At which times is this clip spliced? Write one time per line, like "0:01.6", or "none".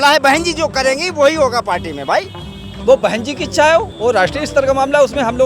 0:02.8